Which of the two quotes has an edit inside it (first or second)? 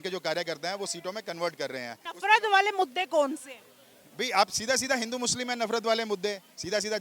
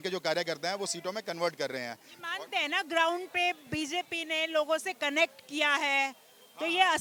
first